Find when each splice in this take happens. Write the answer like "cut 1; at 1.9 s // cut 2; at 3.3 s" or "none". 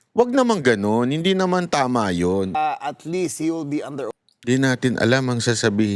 cut 1; at 2.6 s